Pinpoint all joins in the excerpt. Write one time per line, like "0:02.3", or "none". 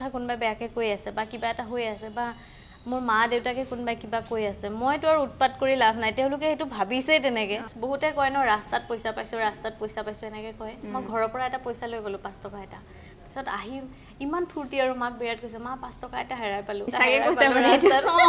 0:07.7
0:16.9